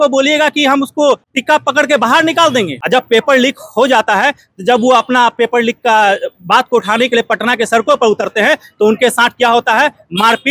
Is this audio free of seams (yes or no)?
no